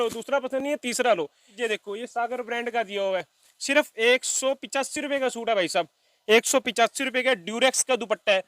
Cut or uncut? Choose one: cut